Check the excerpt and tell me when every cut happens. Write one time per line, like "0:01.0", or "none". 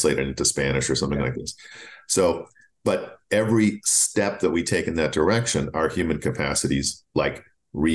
none